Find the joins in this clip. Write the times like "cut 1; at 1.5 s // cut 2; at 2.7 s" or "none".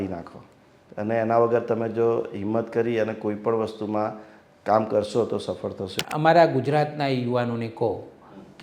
cut 1; at 5.9 s